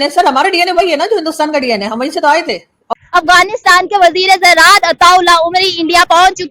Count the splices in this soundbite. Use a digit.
1